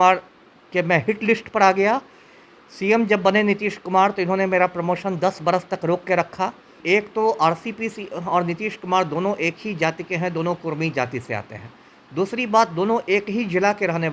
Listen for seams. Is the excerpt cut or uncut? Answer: cut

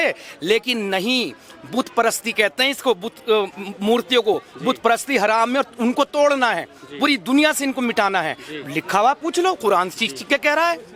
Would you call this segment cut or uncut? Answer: uncut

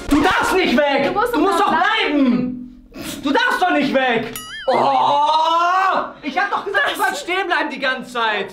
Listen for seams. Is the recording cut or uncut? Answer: uncut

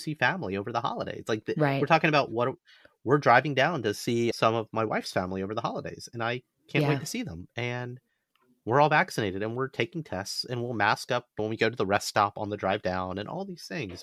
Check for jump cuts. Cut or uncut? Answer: uncut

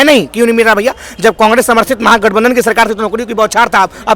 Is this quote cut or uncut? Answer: uncut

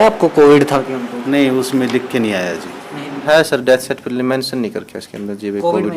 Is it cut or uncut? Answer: cut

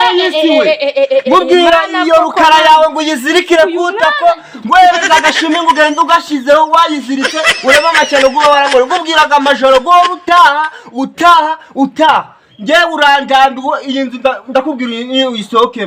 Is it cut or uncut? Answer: uncut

